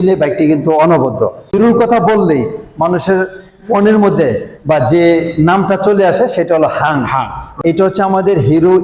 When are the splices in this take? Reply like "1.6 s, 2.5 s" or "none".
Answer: 1.5 s, 7.5 s